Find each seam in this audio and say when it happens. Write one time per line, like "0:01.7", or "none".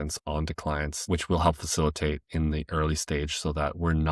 0:01.0